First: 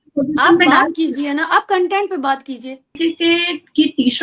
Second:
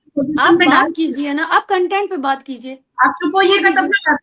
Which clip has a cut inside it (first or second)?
first